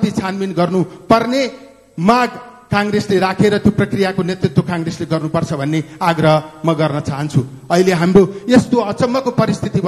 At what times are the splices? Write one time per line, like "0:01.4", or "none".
none